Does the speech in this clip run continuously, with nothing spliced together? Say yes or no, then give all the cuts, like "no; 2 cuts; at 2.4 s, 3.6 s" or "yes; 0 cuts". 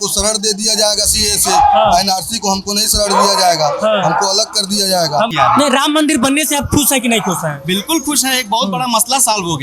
no; 1 cut; at 5.3 s